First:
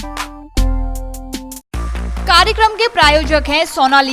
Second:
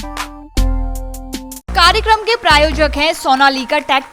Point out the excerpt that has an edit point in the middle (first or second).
second